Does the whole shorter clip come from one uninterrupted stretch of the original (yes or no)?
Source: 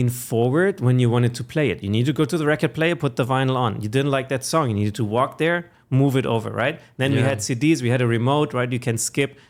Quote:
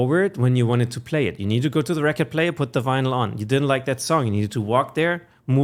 yes